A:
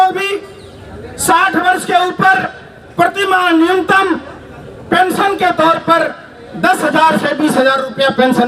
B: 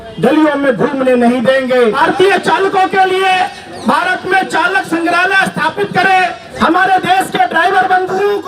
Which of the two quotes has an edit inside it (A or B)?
B